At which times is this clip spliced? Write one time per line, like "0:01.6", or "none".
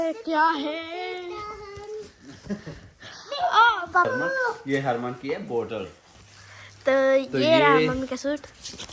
0:04.0